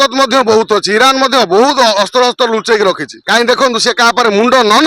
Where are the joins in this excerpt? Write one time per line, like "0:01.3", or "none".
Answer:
0:03.1